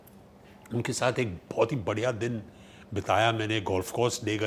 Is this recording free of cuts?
yes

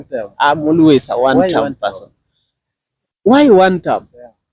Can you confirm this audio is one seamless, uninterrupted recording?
yes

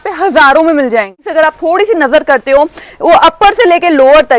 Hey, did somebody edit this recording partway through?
yes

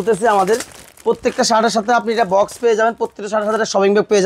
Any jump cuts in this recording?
no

